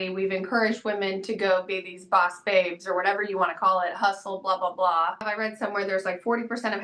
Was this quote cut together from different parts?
yes; 1 cut; at 5.3 s

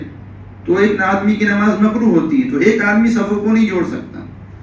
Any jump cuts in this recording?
no; 0 cuts

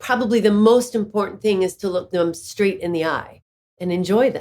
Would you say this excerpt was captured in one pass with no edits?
no; 1 cut; at 2.1 s

